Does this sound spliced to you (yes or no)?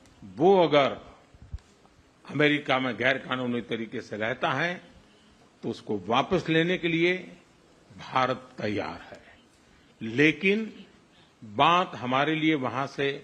no